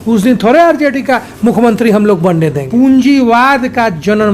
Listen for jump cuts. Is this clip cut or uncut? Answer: cut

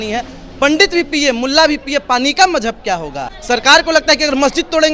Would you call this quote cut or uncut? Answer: cut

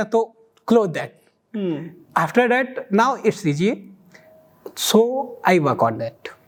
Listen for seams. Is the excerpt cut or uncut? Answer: uncut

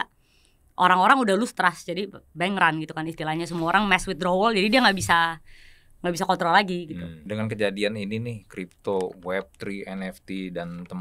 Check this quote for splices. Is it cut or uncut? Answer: cut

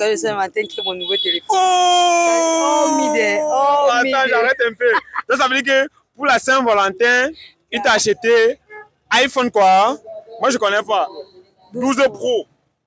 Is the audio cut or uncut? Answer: uncut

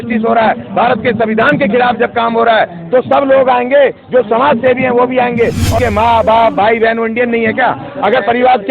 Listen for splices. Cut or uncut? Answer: cut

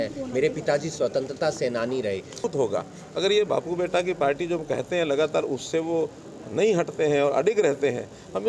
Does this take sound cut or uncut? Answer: cut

